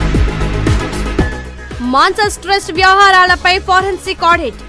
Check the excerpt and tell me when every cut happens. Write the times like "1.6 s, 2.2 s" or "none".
0.8 s, 1.3 s